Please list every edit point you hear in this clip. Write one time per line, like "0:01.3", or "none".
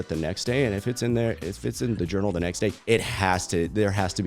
0:02.8